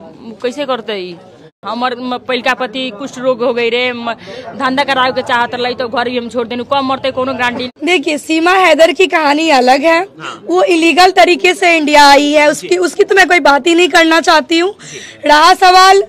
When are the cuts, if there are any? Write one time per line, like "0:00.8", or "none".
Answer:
0:01.6
0:07.7